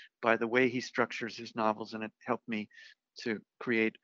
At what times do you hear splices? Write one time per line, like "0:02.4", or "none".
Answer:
none